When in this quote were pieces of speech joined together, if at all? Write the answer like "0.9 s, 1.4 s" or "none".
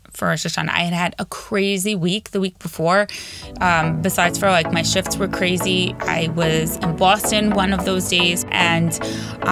8.5 s